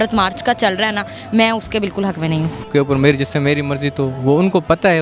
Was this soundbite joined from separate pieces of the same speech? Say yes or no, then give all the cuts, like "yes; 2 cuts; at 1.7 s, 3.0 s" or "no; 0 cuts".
yes; 1 cut; at 2.6 s